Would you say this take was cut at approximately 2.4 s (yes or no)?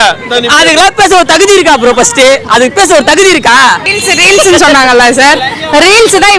no